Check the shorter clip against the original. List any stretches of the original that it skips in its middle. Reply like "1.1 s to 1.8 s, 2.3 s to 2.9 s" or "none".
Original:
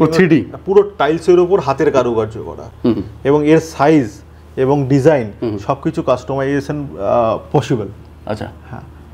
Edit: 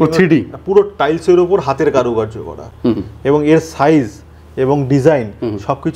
none